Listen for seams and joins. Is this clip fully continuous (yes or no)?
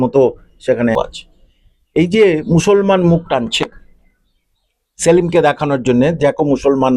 no